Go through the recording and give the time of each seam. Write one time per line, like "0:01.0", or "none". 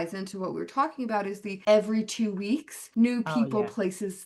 0:01.5
0:02.8